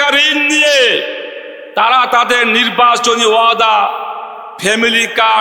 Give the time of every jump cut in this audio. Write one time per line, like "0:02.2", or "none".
none